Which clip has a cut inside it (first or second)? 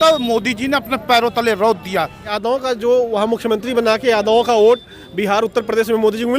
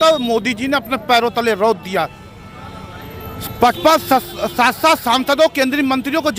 first